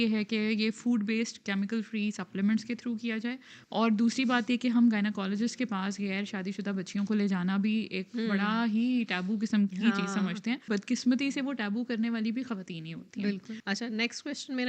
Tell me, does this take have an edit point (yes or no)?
yes